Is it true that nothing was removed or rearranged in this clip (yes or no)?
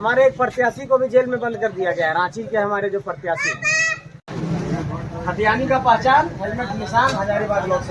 no